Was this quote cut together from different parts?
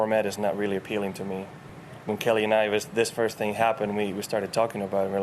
no; 0 cuts

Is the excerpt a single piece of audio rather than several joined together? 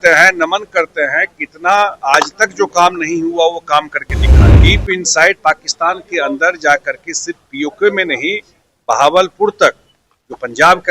no; 1 cut; at 4.6 s

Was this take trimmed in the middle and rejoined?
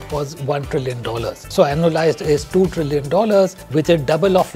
yes; 2 cuts; at 1.5 s, 3.6 s

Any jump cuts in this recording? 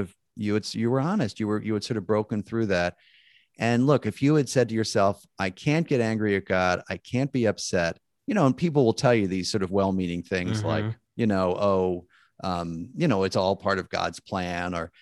no; 0 cuts

